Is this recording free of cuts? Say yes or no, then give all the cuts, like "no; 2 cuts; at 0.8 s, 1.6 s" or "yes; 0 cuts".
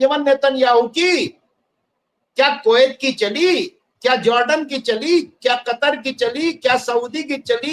yes; 0 cuts